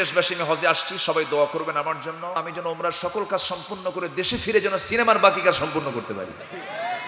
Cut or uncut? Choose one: cut